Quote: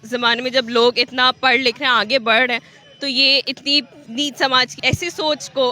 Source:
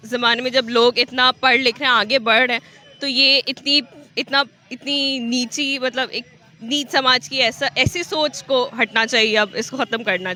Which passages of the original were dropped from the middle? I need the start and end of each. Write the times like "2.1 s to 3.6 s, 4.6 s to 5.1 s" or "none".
4.0 s to 6.5 s, 7.3 s to 7.7 s